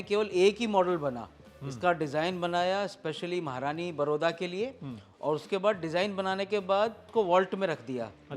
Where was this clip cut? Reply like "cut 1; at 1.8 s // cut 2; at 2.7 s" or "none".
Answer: cut 1; at 7.1 s